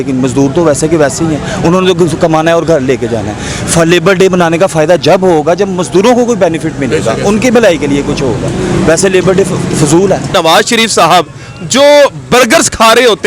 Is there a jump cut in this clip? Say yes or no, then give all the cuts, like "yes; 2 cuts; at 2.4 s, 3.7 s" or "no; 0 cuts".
yes; 1 cut; at 10.3 s